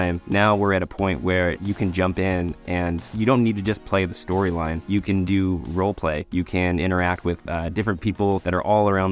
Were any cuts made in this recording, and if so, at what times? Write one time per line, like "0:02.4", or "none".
0:04.8